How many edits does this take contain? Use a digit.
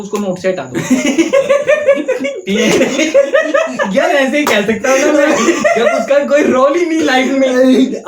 0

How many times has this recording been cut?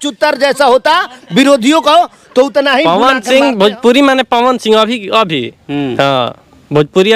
1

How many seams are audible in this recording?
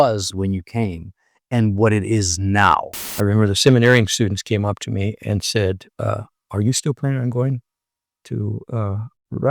1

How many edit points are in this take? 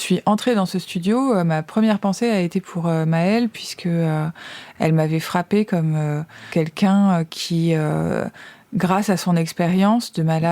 2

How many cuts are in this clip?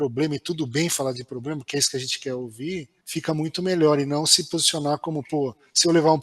1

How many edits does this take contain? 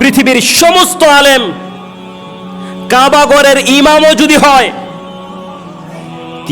2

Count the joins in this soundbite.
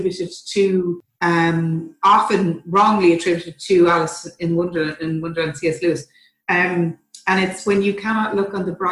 1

